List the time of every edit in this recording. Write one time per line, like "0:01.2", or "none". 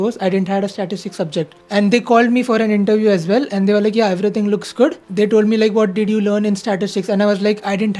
0:01.6
0:05.0